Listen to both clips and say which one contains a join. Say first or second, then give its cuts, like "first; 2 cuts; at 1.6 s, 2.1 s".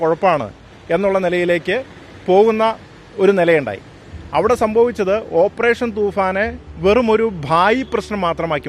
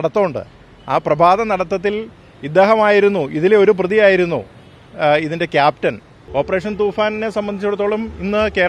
second; 1 cut; at 6.1 s